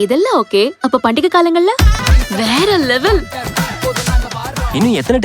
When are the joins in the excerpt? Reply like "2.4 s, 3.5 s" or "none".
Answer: 2.0 s